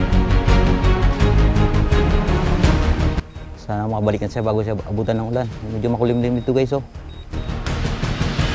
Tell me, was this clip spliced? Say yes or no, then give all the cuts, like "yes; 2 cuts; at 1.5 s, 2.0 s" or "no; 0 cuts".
no; 0 cuts